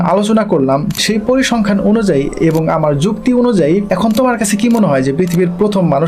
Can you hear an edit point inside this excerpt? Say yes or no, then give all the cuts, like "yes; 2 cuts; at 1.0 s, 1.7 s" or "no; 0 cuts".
yes; 2 cuts; at 1.0 s, 3.9 s